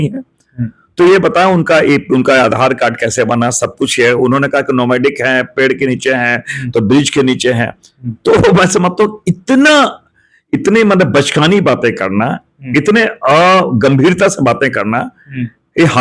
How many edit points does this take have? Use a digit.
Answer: 0